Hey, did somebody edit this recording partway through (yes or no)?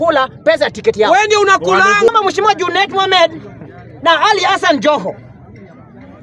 yes